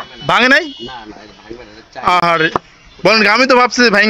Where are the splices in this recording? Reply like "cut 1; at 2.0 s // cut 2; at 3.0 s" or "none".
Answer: none